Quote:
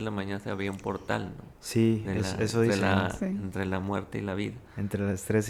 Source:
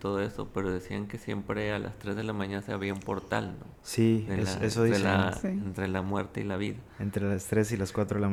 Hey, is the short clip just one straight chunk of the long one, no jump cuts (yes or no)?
yes